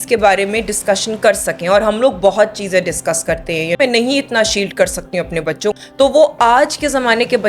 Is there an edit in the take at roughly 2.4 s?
no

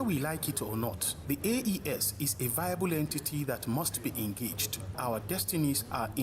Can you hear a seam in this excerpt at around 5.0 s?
yes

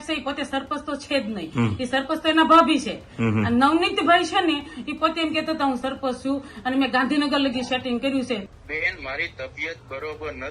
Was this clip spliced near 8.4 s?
yes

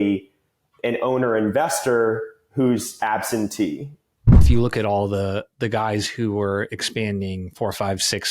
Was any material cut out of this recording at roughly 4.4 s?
yes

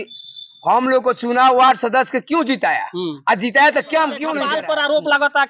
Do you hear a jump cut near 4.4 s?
yes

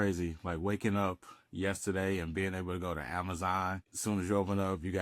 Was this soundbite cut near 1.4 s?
no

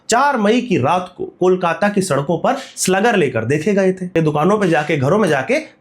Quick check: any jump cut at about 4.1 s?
yes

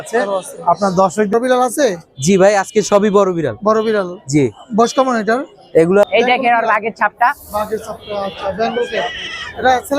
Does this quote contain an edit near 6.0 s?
yes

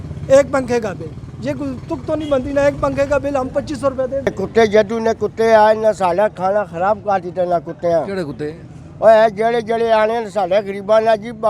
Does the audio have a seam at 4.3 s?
yes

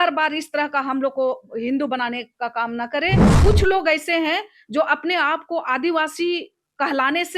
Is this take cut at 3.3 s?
yes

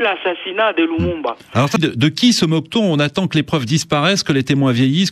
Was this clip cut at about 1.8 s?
yes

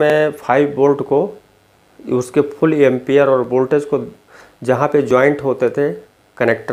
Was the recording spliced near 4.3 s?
no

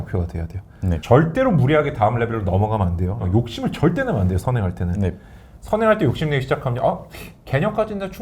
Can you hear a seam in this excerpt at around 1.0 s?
yes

